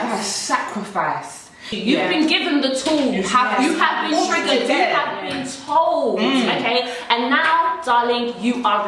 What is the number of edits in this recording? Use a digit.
1